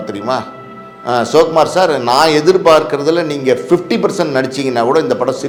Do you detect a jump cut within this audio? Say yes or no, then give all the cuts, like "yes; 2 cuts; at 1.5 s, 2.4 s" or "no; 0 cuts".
no; 0 cuts